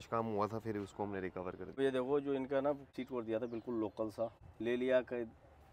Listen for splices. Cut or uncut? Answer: cut